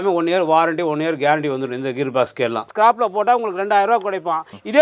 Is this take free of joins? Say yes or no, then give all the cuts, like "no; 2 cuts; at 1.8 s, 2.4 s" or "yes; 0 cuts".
no; 1 cut; at 2.7 s